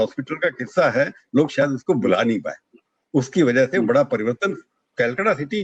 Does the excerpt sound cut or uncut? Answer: uncut